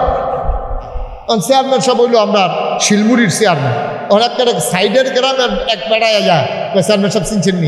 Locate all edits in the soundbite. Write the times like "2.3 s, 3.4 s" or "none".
1.1 s